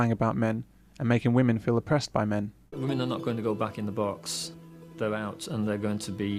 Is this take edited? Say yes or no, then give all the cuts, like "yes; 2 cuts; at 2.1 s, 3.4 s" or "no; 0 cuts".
no; 0 cuts